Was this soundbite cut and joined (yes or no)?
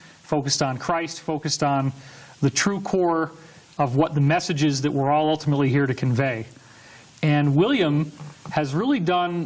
yes